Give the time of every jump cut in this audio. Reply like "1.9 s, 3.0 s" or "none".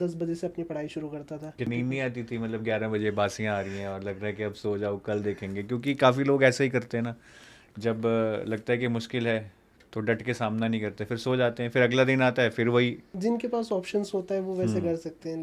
1.7 s, 13.1 s